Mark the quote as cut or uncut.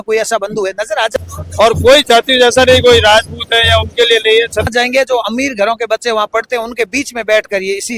cut